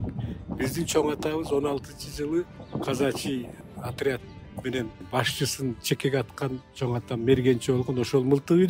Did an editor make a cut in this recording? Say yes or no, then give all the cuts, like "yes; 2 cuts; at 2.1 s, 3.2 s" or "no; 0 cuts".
yes; 3 cuts; at 2.6 s, 3.6 s, 5.0 s